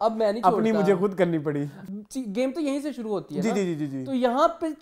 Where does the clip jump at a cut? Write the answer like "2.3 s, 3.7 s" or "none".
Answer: 1.8 s